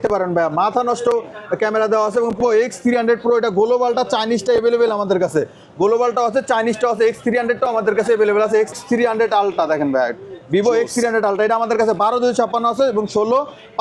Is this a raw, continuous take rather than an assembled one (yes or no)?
no